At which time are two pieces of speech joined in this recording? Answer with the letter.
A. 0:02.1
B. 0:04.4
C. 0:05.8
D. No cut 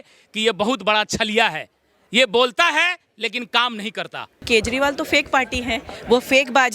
B